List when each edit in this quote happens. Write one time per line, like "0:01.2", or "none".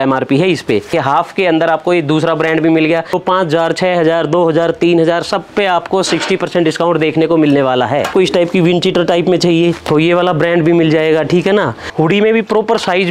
0:00.9
0:03.2
0:08.1
0:11.8